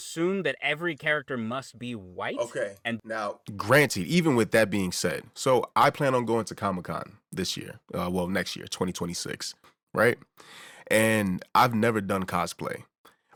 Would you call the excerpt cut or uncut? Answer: uncut